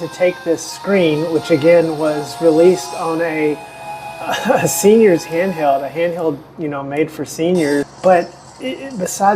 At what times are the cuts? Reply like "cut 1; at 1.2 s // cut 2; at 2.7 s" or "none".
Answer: cut 1; at 7.9 s